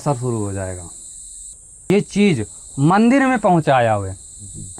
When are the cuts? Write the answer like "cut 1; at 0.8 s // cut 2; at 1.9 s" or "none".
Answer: cut 1; at 1.9 s